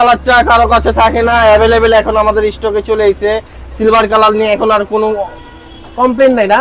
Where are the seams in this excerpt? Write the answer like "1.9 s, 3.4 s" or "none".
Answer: none